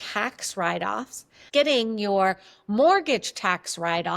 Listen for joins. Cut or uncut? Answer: cut